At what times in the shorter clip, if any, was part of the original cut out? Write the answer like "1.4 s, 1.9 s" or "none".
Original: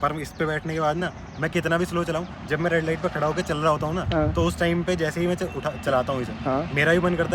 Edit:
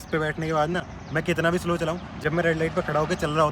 none